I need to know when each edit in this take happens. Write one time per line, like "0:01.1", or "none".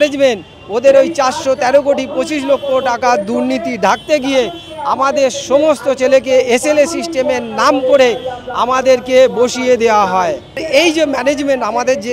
0:10.6